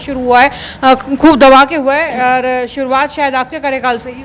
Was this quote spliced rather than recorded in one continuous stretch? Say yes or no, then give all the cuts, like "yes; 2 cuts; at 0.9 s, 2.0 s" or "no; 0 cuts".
no; 0 cuts